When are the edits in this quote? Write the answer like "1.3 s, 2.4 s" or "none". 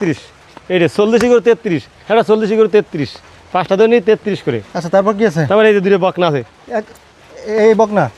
none